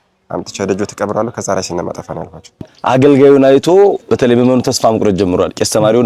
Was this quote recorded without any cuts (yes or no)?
no